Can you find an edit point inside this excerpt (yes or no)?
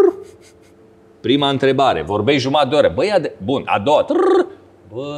no